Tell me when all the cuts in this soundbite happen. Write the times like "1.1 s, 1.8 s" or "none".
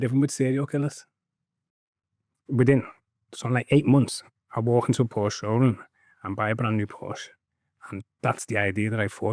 1.8 s